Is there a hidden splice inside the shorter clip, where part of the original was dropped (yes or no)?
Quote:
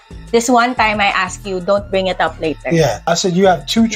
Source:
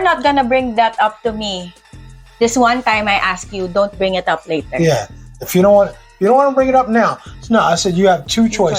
yes